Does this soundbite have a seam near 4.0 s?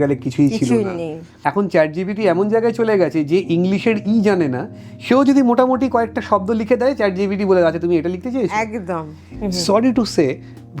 no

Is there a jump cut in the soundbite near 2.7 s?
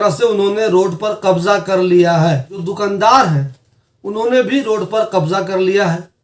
yes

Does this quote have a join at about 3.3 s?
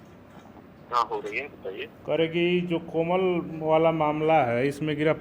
no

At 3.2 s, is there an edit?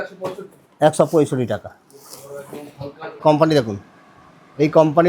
yes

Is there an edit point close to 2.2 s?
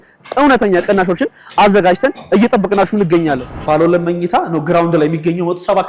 no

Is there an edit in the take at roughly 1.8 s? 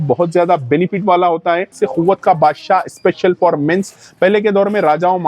yes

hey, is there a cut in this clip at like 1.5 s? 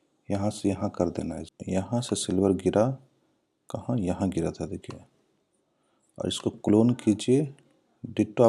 yes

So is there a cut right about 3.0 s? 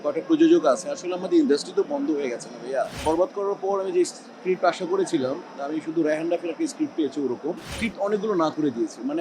yes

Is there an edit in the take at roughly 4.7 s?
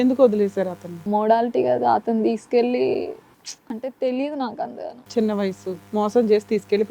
no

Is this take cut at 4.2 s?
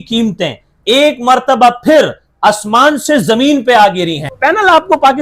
yes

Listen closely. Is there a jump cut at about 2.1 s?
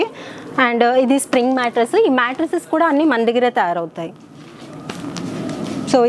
no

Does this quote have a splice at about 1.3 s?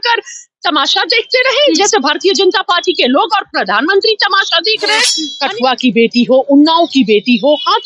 no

